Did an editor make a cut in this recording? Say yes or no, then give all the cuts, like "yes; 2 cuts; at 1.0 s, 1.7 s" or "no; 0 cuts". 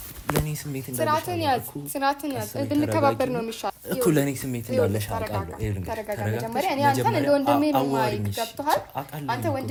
no; 0 cuts